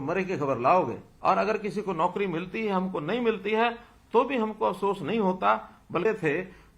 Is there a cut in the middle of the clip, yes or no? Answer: yes